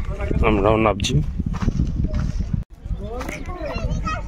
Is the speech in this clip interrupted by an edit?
no; 0 cuts

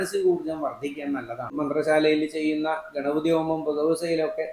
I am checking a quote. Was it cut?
yes; 1 cut; at 1.6 s

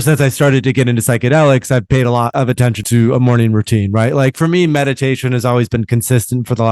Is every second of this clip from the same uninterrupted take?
no; 1 cut; at 2.7 s

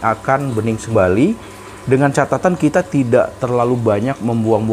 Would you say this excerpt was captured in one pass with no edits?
no; 1 cut; at 0.9 s

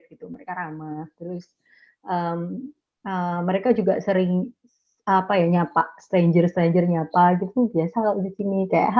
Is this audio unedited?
yes; 0 cuts

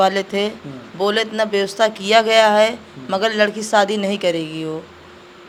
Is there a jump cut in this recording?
no; 0 cuts

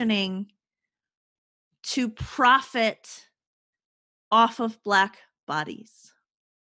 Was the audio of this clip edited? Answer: no; 0 cuts

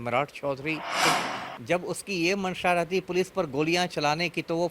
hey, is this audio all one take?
no; 1 cut; at 1.0 s

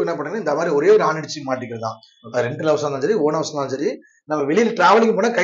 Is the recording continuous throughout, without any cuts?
yes; 0 cuts

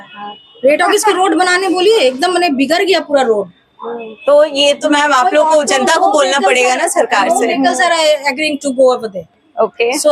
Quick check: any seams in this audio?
no; 0 cuts

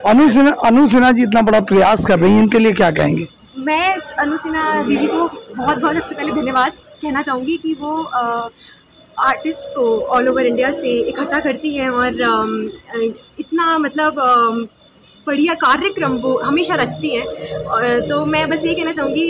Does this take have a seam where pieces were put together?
no; 0 cuts

